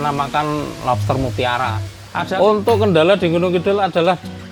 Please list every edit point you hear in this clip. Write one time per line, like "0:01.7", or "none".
0:02.3